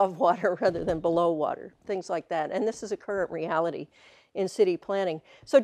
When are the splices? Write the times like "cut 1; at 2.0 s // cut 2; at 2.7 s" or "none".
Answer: cut 1; at 3.3 s